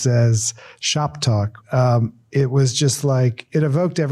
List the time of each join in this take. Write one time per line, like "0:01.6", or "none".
0:01.5